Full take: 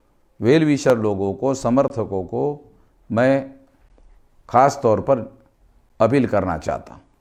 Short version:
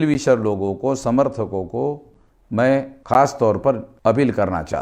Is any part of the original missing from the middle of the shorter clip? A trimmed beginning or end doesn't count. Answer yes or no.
yes